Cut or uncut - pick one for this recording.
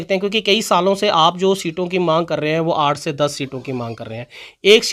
uncut